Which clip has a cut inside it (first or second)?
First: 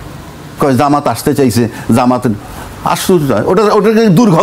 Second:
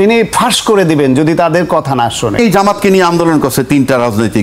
second